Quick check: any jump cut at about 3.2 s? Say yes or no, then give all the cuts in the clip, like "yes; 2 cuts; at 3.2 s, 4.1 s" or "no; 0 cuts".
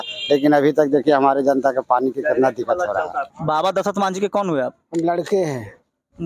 yes; 1 cut; at 3.2 s